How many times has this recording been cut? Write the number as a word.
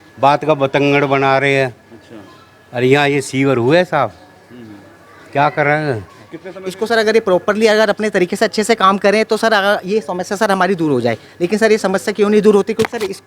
one